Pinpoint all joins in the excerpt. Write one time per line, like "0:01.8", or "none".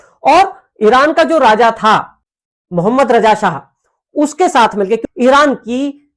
0:05.0